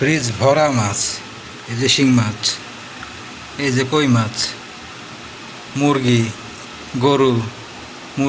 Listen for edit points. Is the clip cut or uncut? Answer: uncut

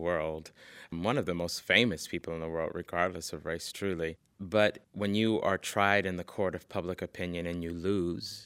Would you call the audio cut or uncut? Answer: cut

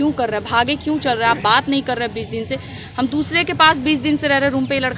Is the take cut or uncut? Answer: uncut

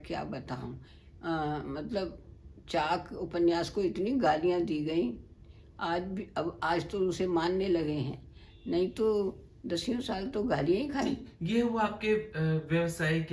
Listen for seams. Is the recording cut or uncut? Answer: uncut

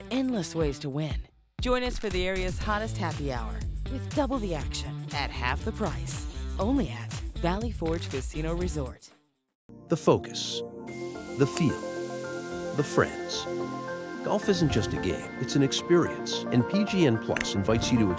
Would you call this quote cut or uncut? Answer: cut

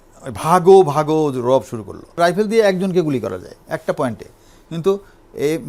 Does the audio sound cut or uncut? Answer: cut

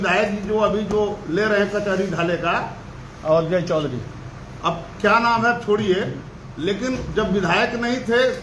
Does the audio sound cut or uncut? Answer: uncut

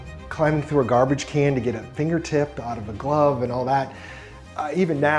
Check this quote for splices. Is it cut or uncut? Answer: uncut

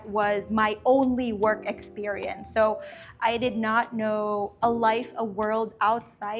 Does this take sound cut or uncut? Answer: uncut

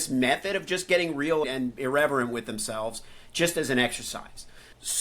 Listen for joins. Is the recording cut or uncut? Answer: cut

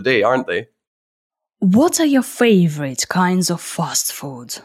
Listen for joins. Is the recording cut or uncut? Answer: uncut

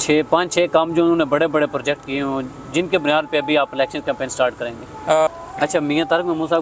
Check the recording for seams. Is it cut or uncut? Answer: cut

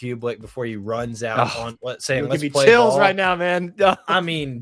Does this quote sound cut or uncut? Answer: uncut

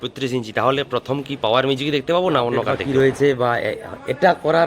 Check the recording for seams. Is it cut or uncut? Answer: cut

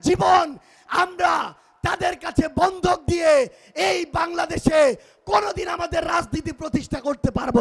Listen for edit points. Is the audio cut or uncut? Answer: uncut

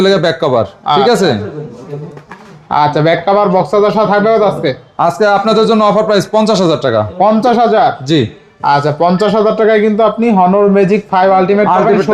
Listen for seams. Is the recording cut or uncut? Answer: uncut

